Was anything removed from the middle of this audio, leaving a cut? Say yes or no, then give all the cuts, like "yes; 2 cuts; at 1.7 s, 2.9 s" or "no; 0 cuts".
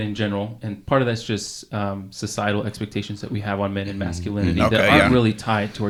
no; 0 cuts